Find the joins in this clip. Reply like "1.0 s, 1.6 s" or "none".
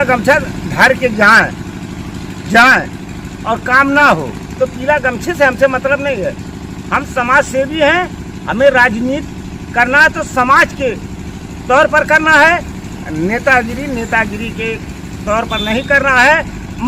none